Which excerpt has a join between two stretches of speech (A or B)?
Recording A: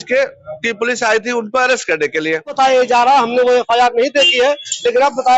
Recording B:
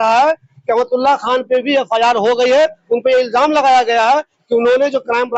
A